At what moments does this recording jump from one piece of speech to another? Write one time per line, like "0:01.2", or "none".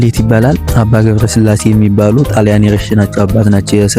none